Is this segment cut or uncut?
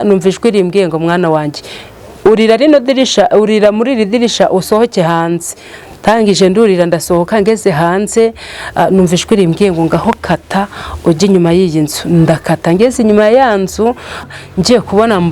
cut